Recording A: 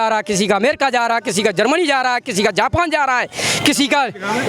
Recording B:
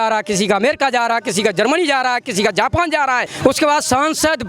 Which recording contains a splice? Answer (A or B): B